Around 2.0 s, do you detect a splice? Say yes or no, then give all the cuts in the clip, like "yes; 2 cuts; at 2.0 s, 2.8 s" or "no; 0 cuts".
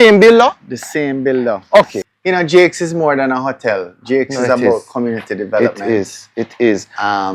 yes; 1 cut; at 2.0 s